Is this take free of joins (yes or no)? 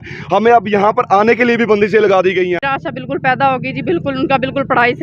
no